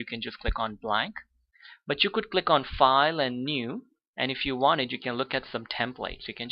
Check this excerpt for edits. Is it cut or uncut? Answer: cut